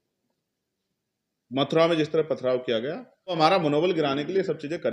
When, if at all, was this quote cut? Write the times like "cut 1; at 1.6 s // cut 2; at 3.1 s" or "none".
cut 1; at 3.4 s